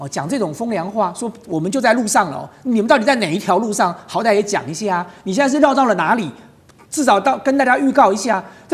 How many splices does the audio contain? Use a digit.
0